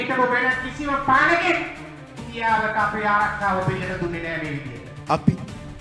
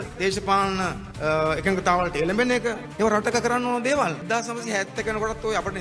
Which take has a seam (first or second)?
second